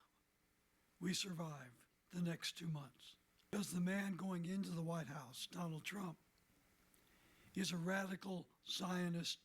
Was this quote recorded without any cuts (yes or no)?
no